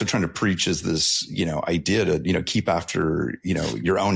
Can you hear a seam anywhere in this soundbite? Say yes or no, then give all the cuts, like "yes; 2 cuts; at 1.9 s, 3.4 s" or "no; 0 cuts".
no; 0 cuts